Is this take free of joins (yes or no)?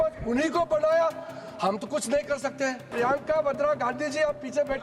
no